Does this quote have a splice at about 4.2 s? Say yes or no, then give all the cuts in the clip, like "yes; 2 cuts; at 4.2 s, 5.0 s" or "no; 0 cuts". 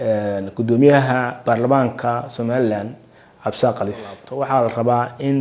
yes; 1 cut; at 4.2 s